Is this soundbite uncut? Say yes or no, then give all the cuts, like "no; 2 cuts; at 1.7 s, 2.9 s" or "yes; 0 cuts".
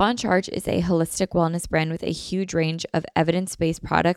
yes; 0 cuts